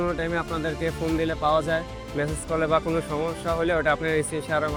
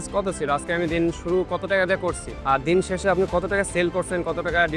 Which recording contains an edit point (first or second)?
second